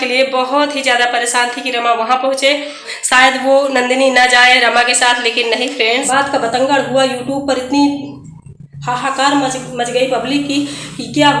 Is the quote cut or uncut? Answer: cut